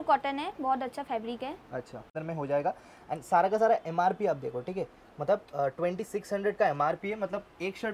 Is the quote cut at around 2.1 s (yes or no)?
yes